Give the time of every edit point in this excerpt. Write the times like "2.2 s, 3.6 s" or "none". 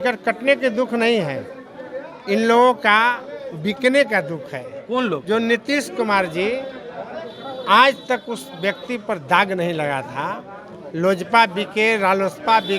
none